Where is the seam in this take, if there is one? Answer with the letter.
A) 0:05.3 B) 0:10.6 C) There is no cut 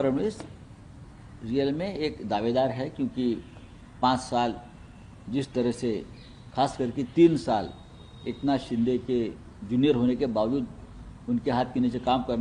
C